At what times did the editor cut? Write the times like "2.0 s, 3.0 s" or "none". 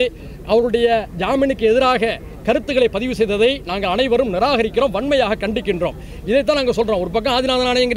none